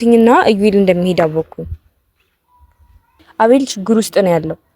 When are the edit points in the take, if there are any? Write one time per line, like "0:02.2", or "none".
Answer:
0:03.1